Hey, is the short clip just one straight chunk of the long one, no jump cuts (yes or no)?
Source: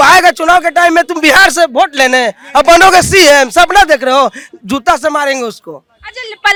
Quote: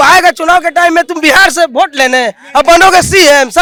yes